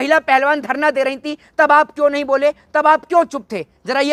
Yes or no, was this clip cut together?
no